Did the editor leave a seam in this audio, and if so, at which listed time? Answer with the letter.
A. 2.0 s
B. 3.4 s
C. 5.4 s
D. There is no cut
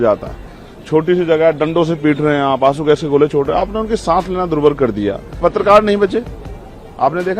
C